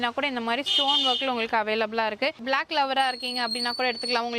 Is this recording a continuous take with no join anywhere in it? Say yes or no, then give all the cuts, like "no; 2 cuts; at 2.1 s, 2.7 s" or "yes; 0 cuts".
no; 1 cut; at 2.4 s